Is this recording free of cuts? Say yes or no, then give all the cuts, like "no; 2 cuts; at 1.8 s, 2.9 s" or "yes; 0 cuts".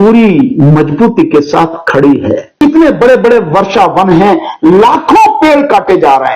no; 1 cut; at 2.5 s